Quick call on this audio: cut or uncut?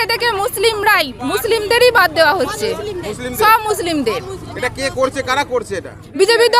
uncut